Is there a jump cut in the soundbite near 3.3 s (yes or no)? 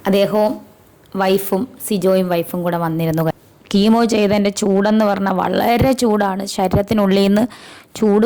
yes